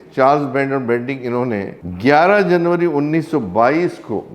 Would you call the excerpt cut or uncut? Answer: cut